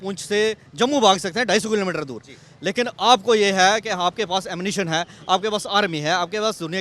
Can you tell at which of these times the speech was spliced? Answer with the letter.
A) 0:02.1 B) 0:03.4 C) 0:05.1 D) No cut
D